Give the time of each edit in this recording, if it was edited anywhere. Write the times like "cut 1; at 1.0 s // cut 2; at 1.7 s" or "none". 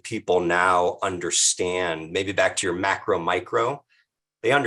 none